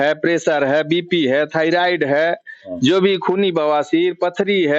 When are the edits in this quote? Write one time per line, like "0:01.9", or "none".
none